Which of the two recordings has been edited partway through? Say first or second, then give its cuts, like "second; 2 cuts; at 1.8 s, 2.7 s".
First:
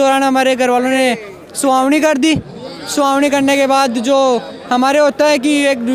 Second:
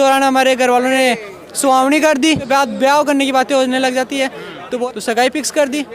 second; 2 cuts; at 2.4 s, 4.8 s